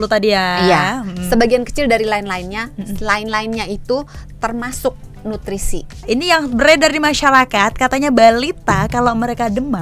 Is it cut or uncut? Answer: cut